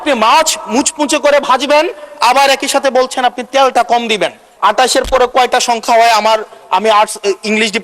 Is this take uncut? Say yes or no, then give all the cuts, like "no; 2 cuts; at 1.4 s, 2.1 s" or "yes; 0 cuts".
no; 1 cut; at 4.5 s